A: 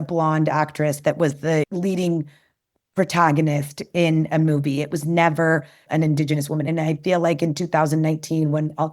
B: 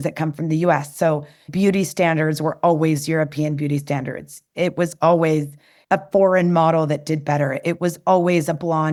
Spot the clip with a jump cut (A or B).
A